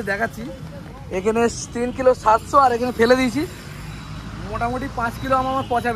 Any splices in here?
no; 0 cuts

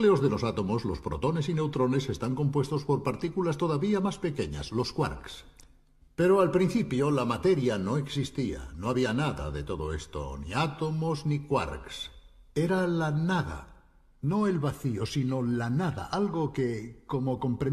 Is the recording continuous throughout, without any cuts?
yes; 0 cuts

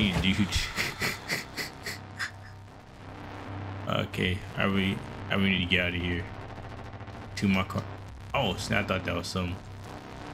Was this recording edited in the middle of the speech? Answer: no; 0 cuts

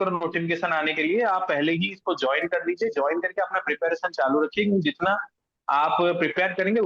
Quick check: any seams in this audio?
no; 0 cuts

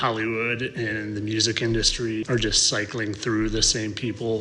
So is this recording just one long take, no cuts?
no; 1 cut; at 2.2 s

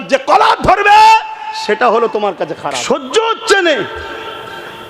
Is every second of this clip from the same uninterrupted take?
no; 1 cut; at 2.7 s

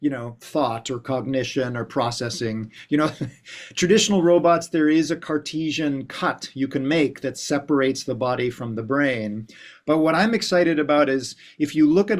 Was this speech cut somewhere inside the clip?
no; 0 cuts

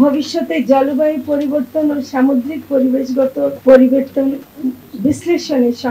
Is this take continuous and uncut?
yes; 0 cuts

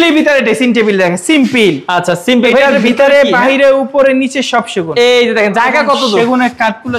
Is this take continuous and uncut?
yes; 0 cuts

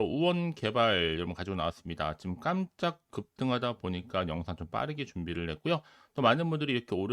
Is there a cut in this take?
no; 0 cuts

